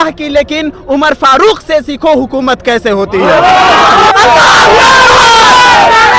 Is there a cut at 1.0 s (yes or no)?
no